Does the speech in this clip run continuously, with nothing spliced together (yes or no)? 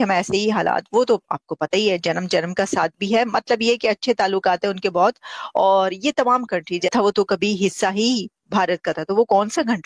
no